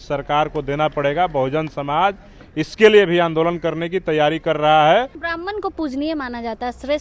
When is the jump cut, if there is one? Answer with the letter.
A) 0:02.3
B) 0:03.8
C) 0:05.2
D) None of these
C